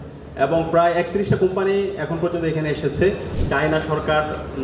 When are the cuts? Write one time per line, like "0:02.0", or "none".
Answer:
0:03.3